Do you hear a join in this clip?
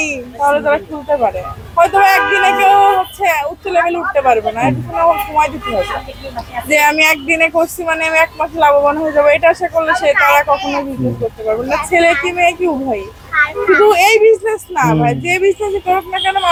no; 0 cuts

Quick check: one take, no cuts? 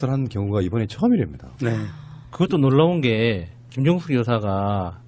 no; 1 cut; at 1.3 s

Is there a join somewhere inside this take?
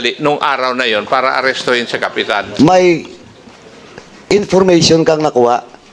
yes; 1 cut; at 2.4 s

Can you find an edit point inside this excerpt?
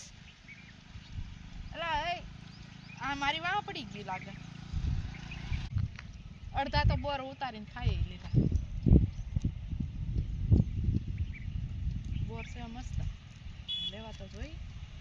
yes; 1 cut; at 5.7 s

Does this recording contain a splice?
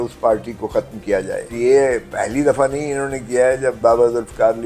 yes; 2 cuts; at 1.5 s, 3.8 s

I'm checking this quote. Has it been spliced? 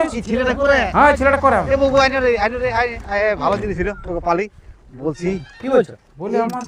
no; 0 cuts

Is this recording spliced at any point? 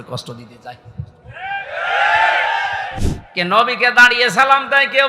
yes; 1 cut; at 2.9 s

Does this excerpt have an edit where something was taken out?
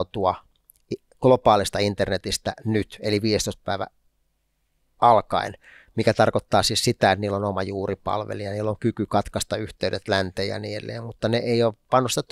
no; 0 cuts

